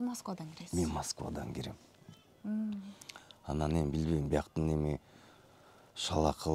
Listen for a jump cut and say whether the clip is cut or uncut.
uncut